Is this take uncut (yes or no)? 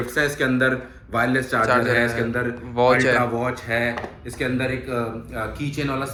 yes